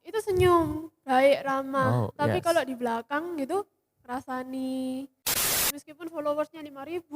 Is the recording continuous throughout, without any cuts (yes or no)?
no